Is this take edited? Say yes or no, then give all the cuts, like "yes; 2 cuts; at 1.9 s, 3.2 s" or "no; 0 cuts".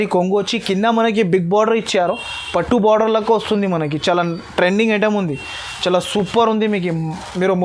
no; 0 cuts